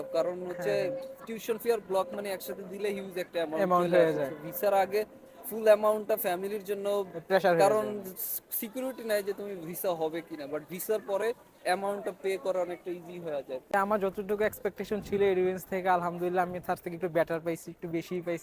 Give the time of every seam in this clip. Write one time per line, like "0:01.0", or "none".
0:13.7